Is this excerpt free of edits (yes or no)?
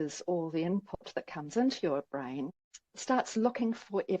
no